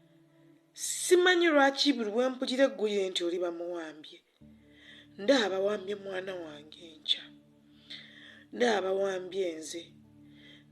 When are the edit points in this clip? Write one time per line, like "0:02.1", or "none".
0:01.0